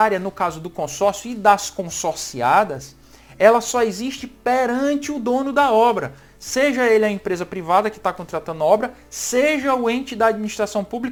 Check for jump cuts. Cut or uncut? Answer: uncut